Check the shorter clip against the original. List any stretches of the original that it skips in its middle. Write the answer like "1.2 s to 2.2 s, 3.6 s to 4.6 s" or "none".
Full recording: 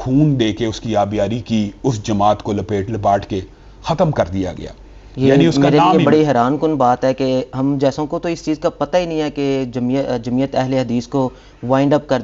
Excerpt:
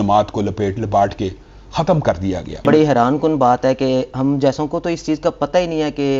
4.8 s to 6.0 s